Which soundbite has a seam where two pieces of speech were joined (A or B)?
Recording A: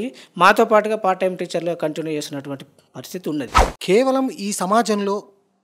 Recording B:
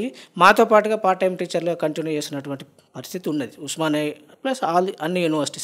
A